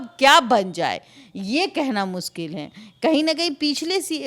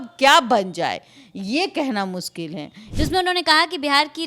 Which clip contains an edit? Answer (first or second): second